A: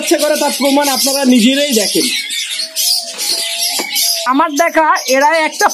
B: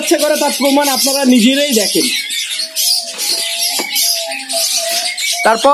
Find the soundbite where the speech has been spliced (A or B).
A